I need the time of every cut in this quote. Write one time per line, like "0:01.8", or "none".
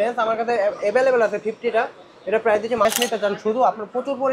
0:02.9